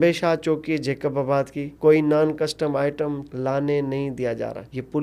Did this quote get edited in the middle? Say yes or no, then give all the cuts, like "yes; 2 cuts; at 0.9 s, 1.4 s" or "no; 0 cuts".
yes; 1 cut; at 1.7 s